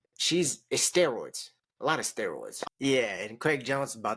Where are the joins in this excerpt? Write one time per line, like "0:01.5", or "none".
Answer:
0:02.5